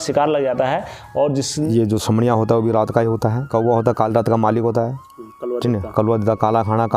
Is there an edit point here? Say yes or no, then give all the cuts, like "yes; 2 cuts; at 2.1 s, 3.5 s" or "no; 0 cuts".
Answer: yes; 2 cuts; at 1.7 s, 3.5 s